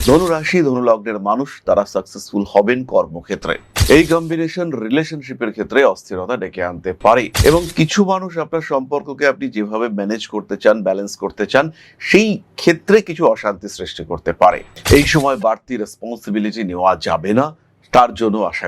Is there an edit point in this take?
yes; 2 cuts; at 3.7 s, 14.7 s

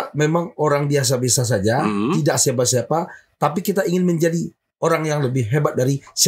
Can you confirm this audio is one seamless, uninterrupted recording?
yes; 0 cuts

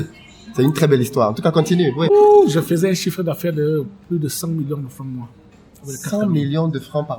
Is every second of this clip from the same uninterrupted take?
no; 1 cut; at 2.1 s

